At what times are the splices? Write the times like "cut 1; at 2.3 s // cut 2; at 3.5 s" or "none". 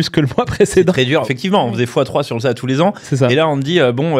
cut 1; at 1.2 s